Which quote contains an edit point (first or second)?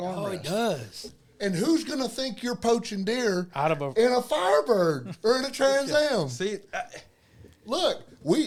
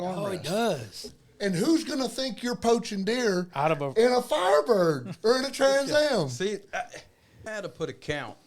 second